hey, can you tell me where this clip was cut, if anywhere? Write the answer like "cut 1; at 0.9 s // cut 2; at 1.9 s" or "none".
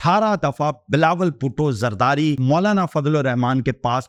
none